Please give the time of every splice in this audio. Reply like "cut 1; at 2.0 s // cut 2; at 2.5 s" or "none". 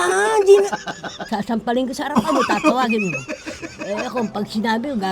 cut 1; at 1.2 s